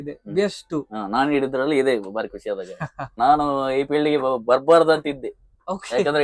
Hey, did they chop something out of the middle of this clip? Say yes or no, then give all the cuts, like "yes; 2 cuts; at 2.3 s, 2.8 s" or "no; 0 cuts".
yes; 1 cut; at 3.1 s